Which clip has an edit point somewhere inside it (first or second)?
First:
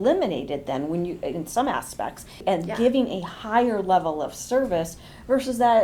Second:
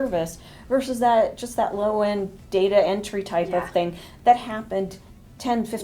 first